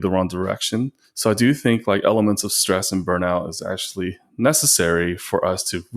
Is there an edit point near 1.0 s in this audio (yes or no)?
yes